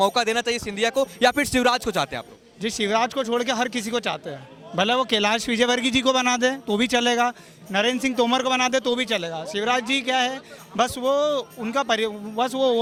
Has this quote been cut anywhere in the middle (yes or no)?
no